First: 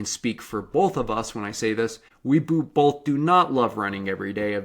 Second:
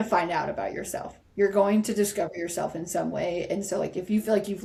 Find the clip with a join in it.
first; 1 cut; at 2.1 s

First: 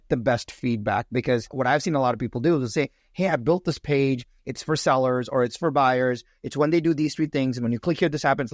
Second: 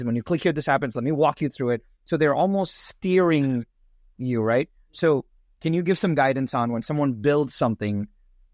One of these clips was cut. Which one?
first; 1 cut; at 1.5 s

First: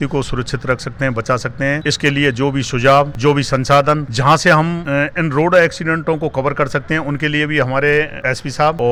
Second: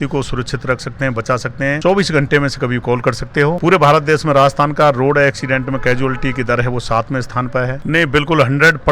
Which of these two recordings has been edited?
second; 3 cuts; at 1.8 s, 3.6 s, 7.8 s

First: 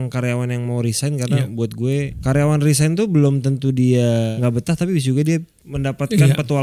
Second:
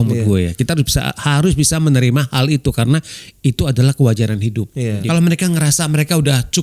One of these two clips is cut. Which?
second; 1 cut; at 5.0 s

